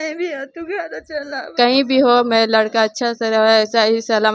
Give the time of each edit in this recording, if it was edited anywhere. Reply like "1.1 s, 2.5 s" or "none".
1.4 s